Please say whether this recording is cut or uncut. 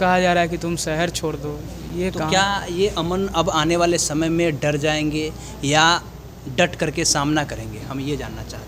uncut